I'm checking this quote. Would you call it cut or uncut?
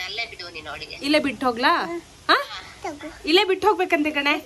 uncut